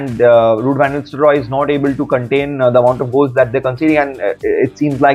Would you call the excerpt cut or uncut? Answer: uncut